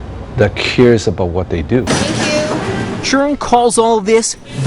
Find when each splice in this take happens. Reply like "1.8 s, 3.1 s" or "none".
1.8 s